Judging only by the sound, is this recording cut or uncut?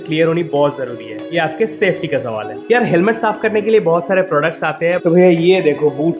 cut